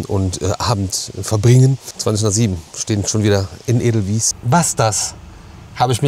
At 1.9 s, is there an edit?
yes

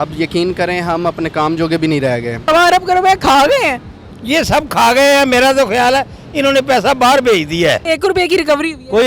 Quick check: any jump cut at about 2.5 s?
yes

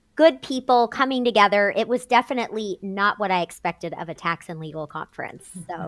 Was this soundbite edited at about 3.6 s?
no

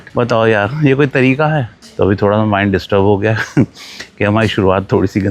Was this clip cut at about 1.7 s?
yes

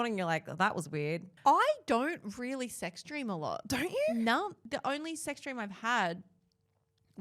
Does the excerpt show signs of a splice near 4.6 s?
yes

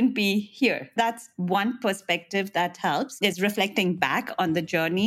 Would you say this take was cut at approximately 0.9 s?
yes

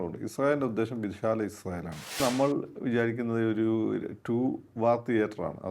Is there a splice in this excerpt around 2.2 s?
yes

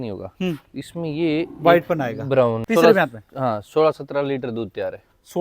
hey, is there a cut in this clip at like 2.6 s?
yes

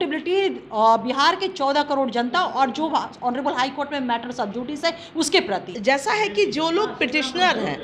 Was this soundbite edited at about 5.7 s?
yes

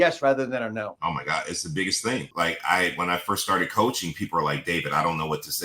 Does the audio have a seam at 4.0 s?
no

